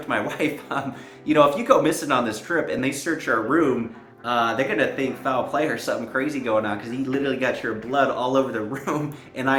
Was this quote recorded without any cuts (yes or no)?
yes